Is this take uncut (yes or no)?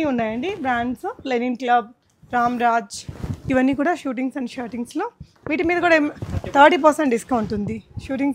yes